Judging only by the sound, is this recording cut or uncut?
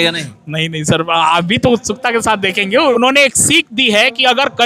cut